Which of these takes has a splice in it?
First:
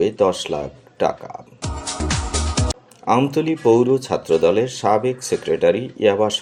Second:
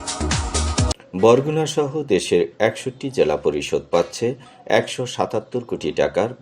second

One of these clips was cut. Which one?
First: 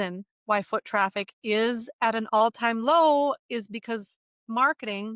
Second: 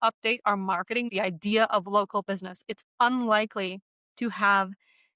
second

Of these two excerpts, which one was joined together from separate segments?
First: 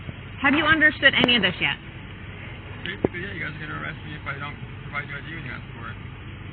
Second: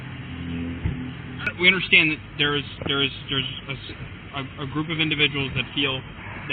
second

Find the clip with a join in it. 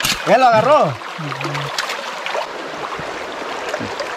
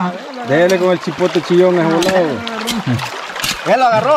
first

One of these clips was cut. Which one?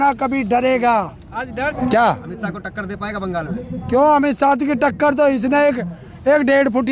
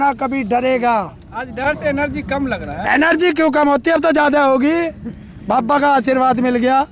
first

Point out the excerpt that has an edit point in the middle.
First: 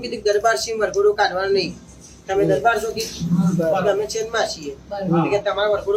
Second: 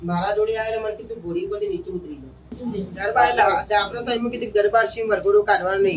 second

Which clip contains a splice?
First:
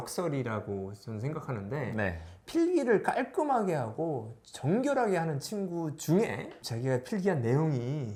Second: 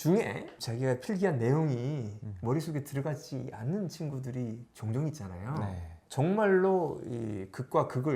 second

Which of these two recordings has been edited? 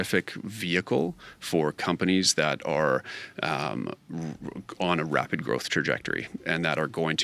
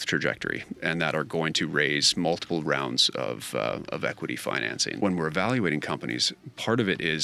second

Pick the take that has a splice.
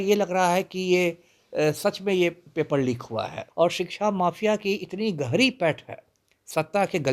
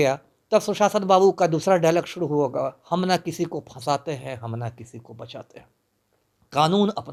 first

